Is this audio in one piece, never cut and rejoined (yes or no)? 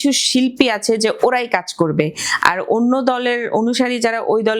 yes